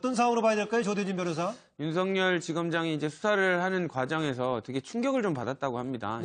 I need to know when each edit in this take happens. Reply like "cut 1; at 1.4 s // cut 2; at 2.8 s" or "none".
cut 1; at 3.0 s